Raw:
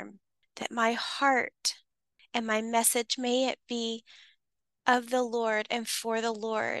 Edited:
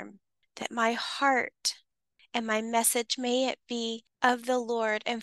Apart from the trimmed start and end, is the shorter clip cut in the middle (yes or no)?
yes